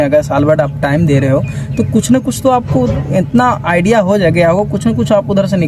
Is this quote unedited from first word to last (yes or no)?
yes